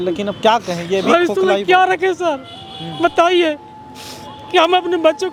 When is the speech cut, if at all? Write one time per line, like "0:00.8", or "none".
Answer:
none